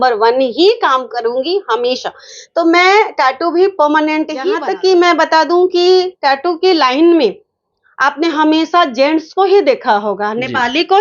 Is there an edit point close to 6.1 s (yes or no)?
no